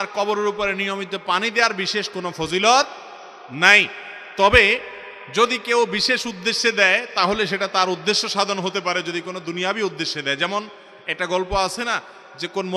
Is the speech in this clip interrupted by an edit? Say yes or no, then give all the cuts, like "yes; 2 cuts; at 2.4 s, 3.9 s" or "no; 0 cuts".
no; 0 cuts